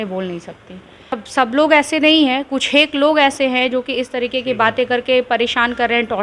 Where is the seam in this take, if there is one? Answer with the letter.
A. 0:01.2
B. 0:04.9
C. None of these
A